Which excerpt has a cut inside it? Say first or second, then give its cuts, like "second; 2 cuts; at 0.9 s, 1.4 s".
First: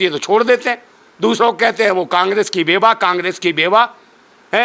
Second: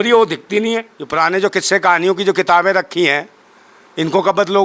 second; 1 cut; at 1.0 s